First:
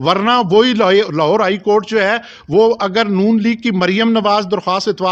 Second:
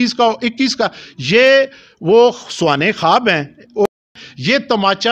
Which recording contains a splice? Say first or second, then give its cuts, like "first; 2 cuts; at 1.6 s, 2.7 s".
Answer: second; 1 cut; at 3.9 s